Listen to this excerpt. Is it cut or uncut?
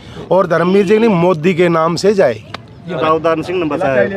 cut